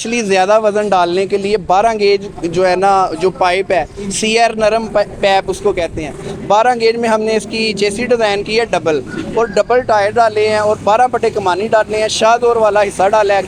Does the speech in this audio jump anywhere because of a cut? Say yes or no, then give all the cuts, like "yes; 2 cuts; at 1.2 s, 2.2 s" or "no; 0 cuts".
no; 0 cuts